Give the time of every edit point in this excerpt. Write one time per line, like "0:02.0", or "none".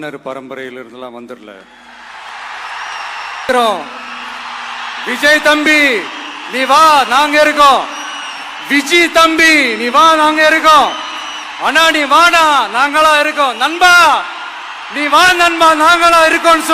0:03.5